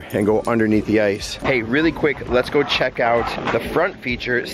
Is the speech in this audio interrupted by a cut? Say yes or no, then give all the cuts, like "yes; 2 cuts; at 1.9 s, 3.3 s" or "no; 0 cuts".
yes; 1 cut; at 1.3 s